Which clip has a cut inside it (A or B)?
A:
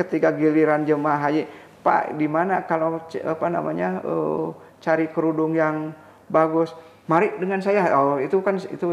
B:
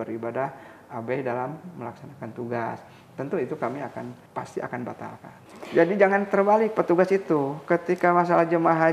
B